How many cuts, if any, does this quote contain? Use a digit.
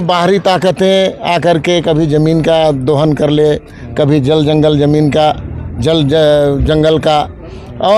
0